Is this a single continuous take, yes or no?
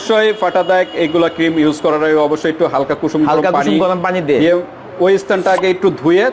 yes